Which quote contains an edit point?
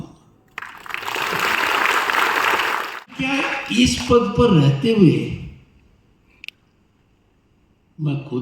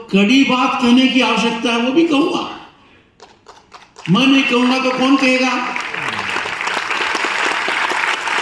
first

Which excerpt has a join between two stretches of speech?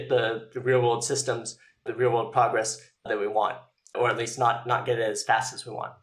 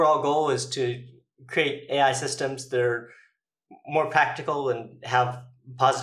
first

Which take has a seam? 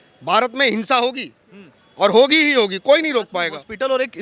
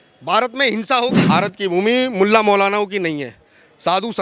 second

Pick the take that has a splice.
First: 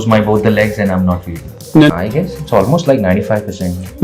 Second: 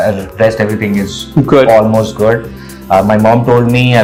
first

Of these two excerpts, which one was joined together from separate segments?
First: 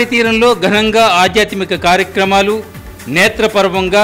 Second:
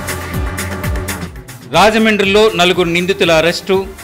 second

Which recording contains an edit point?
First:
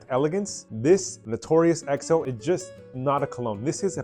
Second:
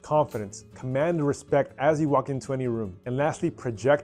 first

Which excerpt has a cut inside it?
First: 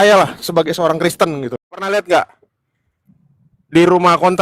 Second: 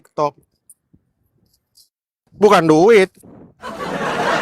first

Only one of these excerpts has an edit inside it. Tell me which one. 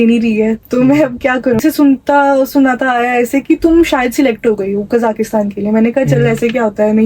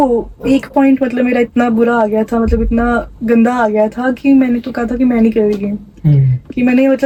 first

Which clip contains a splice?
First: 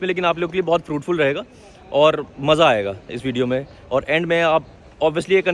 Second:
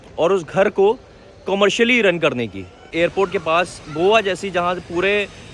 second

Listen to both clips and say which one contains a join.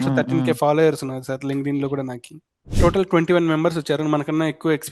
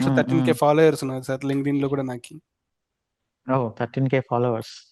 first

